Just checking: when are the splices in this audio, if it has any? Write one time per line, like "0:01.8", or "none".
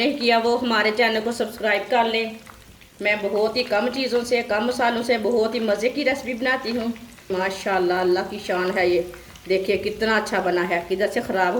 0:07.3